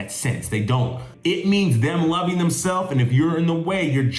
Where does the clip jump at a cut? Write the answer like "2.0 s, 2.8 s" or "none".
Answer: 1.1 s